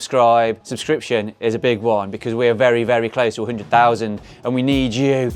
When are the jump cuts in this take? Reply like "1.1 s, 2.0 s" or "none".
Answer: none